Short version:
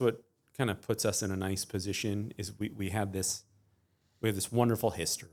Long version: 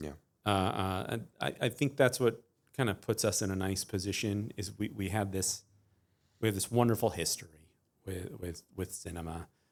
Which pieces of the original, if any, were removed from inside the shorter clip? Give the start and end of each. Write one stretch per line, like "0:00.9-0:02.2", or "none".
none